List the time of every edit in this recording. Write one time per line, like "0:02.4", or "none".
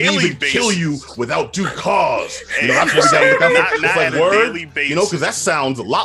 none